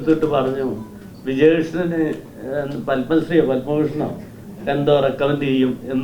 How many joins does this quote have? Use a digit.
0